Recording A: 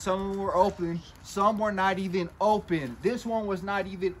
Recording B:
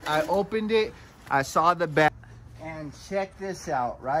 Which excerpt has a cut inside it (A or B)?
B